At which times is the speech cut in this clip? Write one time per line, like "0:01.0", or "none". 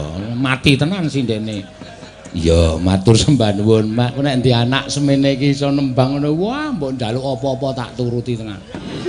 0:04.1